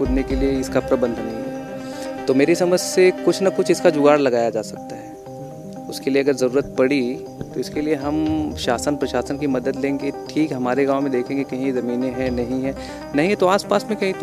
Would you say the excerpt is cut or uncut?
uncut